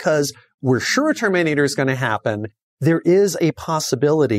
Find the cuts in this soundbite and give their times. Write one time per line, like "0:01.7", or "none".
0:02.5